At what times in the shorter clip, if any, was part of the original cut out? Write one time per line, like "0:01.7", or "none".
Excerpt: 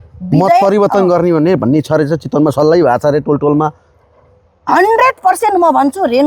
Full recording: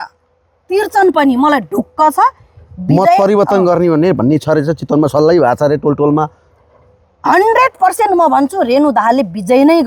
none